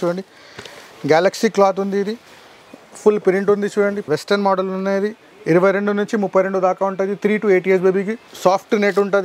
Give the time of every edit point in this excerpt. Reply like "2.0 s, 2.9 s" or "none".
4.0 s, 8.2 s